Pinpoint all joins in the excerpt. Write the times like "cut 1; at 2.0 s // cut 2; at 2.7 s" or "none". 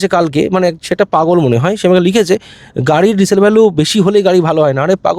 none